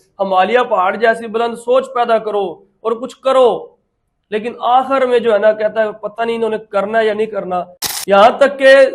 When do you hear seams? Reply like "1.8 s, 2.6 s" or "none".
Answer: 7.8 s